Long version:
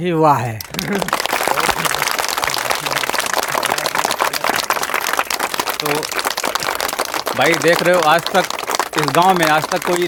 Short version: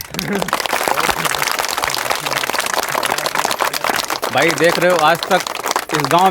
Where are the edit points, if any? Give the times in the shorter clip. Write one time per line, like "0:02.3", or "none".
0:04.1